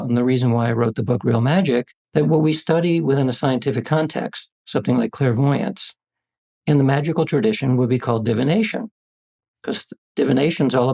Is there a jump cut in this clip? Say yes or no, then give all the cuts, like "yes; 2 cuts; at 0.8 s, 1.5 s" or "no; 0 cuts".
yes; 1 cut; at 2.0 s